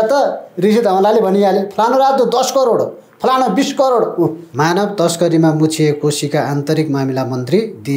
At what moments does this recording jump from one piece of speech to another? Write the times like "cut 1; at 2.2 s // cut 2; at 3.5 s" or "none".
cut 1; at 4.4 s